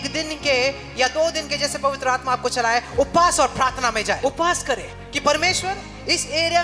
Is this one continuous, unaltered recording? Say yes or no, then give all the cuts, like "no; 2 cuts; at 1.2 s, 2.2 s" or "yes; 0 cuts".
no; 2 cuts; at 4.2 s, 5.0 s